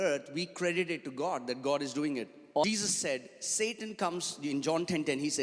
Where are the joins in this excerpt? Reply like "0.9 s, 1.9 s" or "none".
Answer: 2.6 s